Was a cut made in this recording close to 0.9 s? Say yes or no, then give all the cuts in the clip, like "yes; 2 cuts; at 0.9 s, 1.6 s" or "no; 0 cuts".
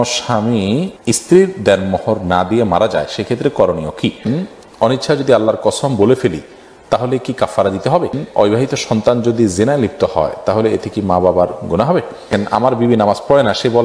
yes; 4 cuts; at 0.9 s, 4.2 s, 8.2 s, 12.3 s